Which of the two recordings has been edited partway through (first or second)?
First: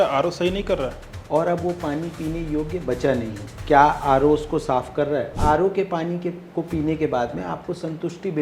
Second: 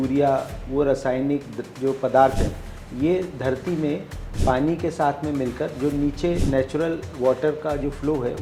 first